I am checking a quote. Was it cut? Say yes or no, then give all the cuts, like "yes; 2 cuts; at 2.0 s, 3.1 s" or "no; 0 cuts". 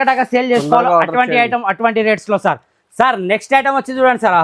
no; 0 cuts